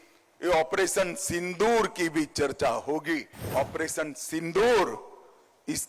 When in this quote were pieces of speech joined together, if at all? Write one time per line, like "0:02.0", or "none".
0:03.5